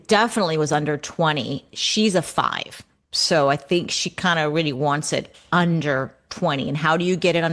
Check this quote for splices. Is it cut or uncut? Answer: uncut